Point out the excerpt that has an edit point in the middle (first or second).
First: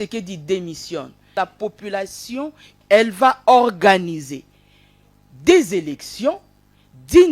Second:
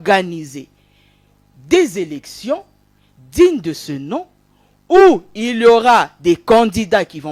first